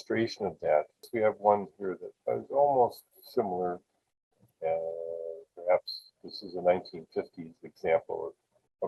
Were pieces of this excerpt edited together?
yes; 1 cut; at 1.1 s

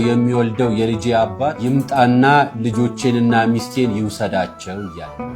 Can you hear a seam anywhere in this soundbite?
no; 0 cuts

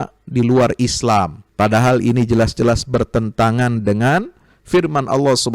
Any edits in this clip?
yes; 1 cut; at 1.4 s

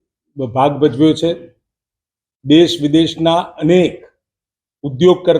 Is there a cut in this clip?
no; 0 cuts

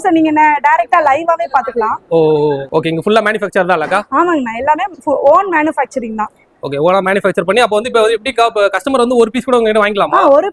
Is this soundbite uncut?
yes; 0 cuts

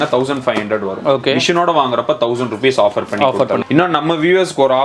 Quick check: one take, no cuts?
no; 1 cut; at 3.6 s

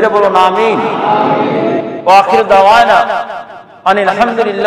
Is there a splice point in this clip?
no; 0 cuts

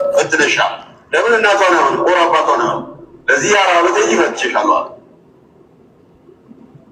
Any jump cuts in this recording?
no; 0 cuts

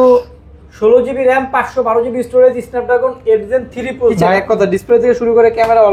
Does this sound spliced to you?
yes; 1 cut; at 4.1 s

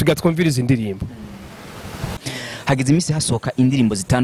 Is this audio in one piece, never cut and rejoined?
no; 1 cut; at 2.2 s

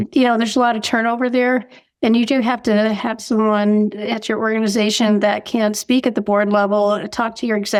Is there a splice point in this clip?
no; 0 cuts

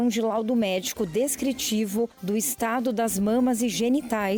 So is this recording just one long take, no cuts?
yes; 0 cuts

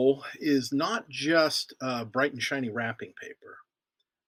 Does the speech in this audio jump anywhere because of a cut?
no; 0 cuts

